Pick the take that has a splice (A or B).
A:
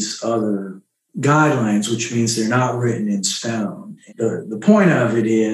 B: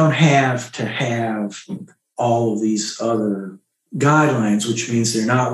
A